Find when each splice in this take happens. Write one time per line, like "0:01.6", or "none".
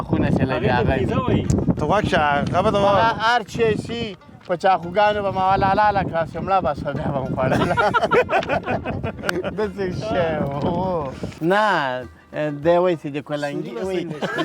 0:11.2